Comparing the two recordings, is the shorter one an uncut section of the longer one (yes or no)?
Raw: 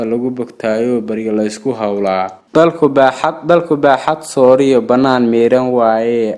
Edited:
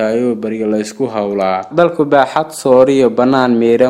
no